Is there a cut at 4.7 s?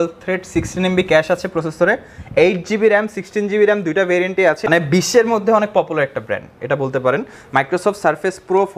yes; 1 cut; at 4.7 s

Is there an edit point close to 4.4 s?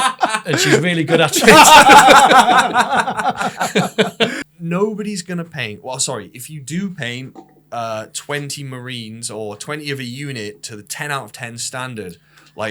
yes; 1 cut; at 4.4 s

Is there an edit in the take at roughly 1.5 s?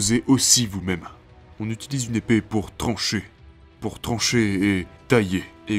yes; 1 cut; at 1.5 s

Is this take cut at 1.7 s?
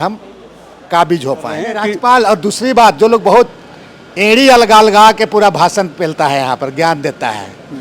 yes; 1 cut; at 1.7 s

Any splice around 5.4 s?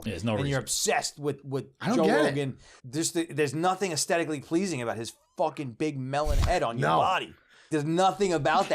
no; 2 cuts; at 2.8 s, 7.7 s

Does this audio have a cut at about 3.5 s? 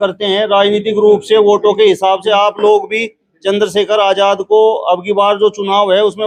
no; 0 cuts

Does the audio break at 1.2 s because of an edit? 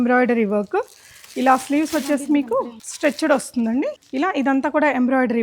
no; 2 cuts; at 2.8 s, 4.0 s

